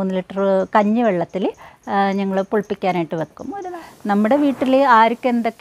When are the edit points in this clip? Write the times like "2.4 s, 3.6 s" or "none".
3.6 s